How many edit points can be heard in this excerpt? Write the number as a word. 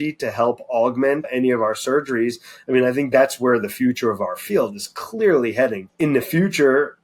two